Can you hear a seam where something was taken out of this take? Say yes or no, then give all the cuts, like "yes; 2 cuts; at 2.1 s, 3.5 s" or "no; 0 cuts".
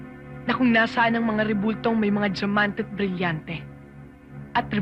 no; 0 cuts